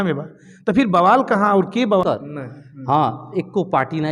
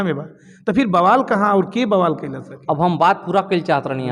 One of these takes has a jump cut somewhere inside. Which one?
first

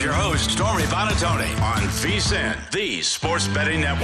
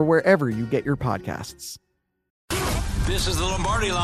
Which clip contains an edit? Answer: second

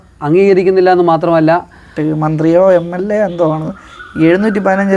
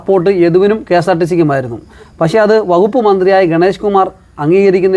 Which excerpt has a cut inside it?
first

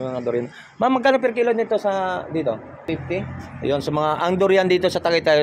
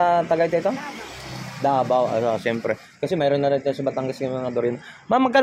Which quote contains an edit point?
first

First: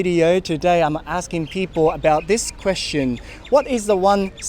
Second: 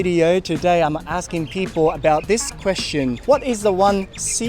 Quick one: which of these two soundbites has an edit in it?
second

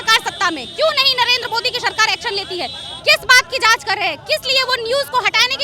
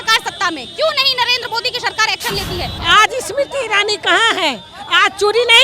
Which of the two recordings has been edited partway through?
second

